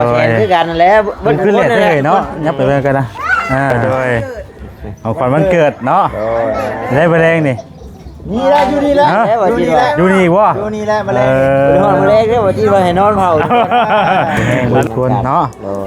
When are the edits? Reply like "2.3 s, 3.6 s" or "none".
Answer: 3.7 s, 14.5 s